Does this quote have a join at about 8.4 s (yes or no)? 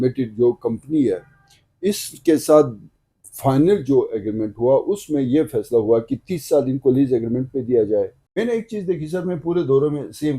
yes